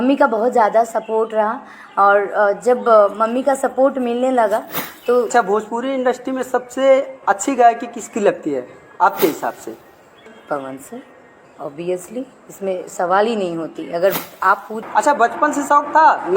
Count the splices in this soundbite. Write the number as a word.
three